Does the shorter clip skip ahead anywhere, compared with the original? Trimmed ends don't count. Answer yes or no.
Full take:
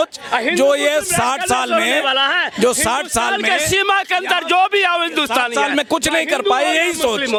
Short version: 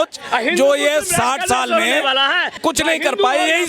yes